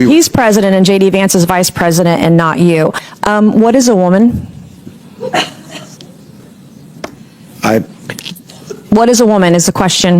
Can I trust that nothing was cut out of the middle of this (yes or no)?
no